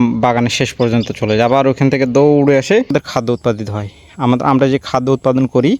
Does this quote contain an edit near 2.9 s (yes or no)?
yes